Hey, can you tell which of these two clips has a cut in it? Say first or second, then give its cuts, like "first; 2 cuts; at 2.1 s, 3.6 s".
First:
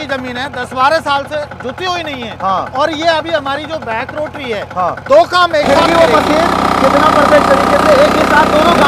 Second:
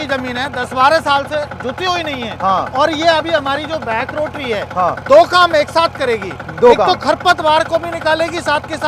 first; 1 cut; at 5.6 s